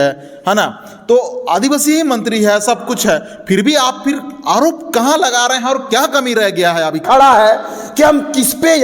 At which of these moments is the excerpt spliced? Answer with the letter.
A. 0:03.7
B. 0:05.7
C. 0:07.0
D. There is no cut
C